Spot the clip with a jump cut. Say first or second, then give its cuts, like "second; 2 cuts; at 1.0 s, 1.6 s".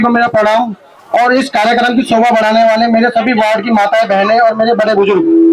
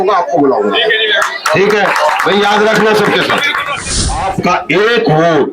second; 1 cut; at 4.0 s